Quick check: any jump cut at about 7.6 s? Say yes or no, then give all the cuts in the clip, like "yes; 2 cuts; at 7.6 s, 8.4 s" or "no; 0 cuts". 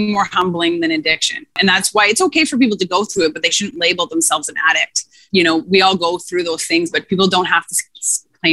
no; 3 cuts; at 1.5 s, 3.1 s, 5.2 s